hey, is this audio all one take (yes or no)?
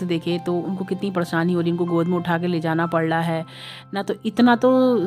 yes